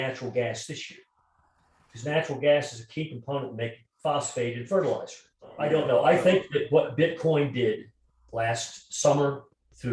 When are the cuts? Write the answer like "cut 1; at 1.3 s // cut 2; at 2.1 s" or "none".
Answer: cut 1; at 5.6 s